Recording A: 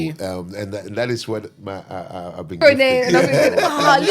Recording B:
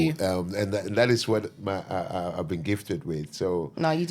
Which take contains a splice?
A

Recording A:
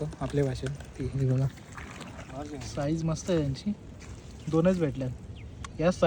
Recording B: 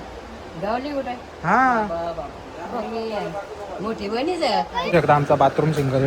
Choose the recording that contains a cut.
B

